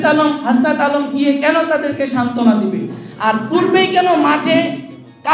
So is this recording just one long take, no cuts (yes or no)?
yes